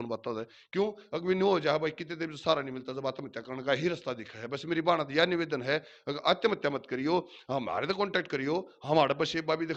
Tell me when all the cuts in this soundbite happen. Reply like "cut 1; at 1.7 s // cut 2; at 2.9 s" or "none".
none

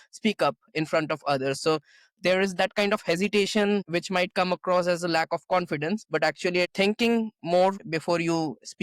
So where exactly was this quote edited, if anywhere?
cut 1; at 6.7 s // cut 2; at 7.9 s

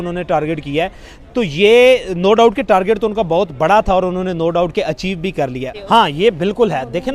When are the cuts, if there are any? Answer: cut 1; at 5.7 s

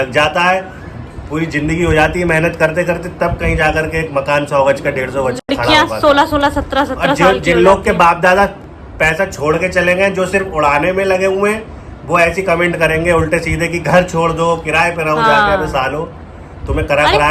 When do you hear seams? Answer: none

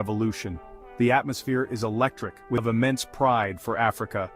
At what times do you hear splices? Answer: cut 1; at 2.6 s

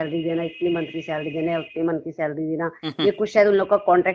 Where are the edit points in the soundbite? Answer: none

